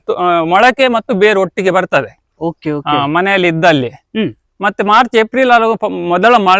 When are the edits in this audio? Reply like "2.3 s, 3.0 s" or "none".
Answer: none